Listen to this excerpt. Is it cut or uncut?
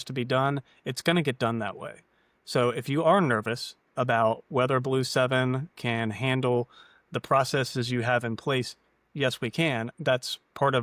uncut